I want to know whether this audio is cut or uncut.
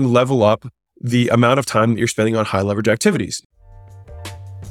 cut